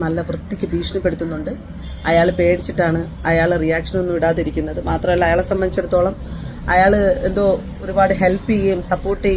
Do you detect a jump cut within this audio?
no; 0 cuts

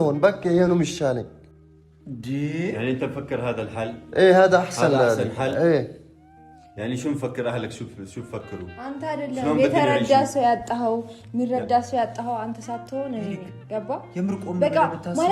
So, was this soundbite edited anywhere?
no; 0 cuts

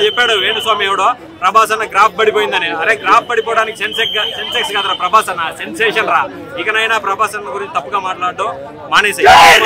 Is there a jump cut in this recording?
no; 0 cuts

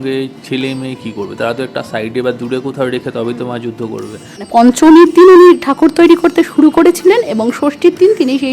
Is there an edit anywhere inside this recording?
yes; 1 cut; at 4.5 s

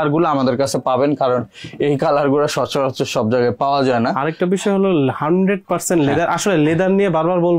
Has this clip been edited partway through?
no; 0 cuts

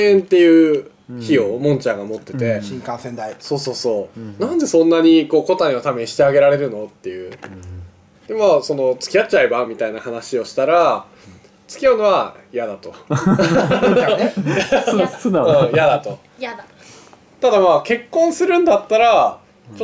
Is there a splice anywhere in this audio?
yes; 1 cut; at 4.8 s

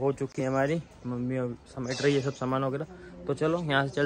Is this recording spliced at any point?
no; 0 cuts

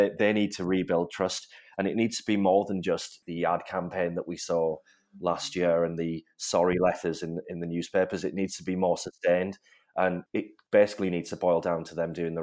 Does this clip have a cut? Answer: no; 0 cuts

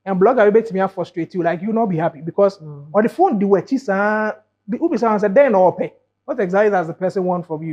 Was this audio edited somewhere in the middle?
no; 0 cuts

